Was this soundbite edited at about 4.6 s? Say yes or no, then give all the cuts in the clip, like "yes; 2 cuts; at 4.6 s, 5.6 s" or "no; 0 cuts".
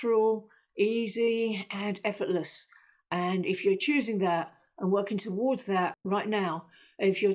no; 1 cut; at 6.0 s